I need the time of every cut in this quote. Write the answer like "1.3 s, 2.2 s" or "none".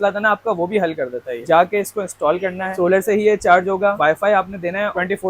1.5 s, 4.0 s

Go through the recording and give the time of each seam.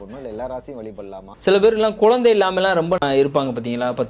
1.3 s, 3.0 s

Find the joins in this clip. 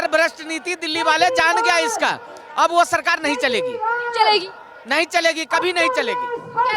none

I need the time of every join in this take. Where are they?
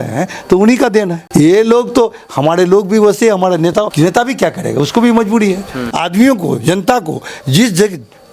1.2 s, 3.9 s, 5.8 s

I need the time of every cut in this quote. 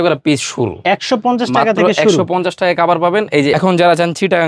3.5 s

